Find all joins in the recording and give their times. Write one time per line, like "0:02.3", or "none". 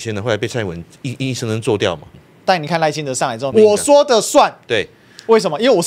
0:02.1
0:03.5